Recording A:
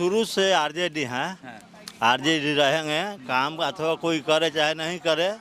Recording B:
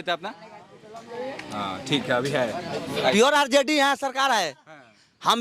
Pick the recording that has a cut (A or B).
B